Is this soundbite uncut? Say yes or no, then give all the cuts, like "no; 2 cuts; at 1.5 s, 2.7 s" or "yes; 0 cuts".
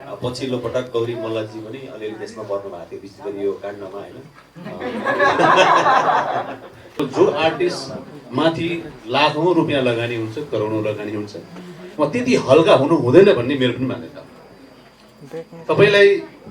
no; 1 cut; at 7.0 s